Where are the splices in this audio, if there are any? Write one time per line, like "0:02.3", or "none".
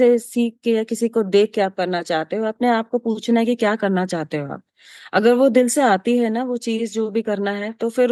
none